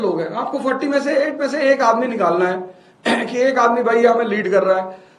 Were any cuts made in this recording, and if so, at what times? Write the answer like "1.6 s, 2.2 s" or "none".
none